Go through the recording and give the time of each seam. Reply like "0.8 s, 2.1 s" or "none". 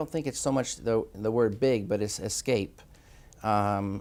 none